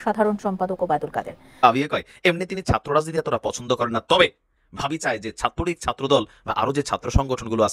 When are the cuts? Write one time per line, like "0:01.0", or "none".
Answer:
0:01.6